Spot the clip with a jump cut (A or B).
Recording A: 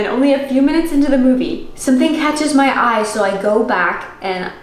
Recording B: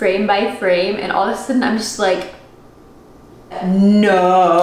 A